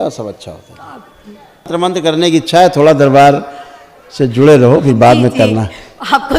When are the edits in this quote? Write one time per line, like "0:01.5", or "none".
0:01.7